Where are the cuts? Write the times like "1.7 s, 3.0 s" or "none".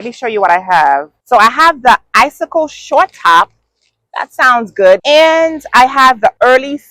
1.1 s, 5.0 s